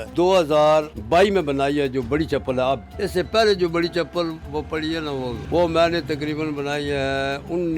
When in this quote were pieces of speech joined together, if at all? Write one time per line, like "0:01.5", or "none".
0:01.0
0:02.9
0:05.4